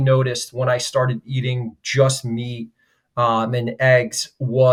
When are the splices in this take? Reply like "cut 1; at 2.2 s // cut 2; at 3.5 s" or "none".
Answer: none